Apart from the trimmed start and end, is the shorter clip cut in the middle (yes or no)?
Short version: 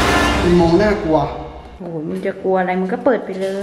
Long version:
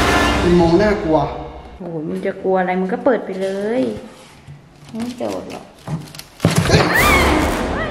no